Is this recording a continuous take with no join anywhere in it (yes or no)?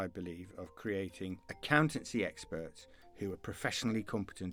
yes